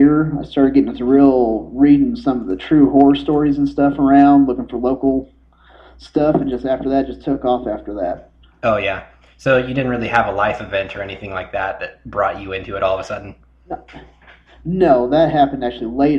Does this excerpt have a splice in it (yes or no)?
yes